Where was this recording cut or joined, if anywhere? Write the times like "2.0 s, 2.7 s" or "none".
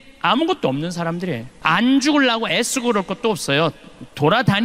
1.5 s